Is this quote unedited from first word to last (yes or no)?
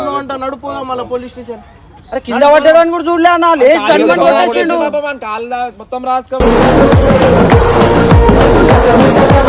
yes